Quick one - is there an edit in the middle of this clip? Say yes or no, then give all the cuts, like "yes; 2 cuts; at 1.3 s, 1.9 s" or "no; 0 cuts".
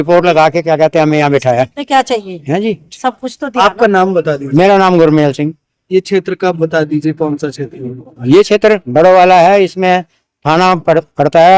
no; 0 cuts